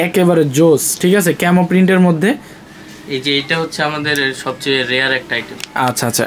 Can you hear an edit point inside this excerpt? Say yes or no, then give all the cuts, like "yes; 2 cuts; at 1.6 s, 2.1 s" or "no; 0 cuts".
yes; 1 cut; at 2.7 s